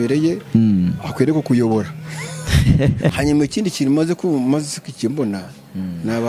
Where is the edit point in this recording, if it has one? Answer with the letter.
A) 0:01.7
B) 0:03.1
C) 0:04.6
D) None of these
B